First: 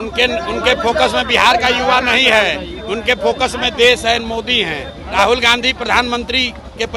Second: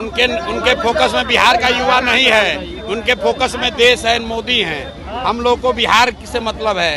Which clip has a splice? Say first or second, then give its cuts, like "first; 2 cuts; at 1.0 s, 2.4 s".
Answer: first; 1 cut; at 5.1 s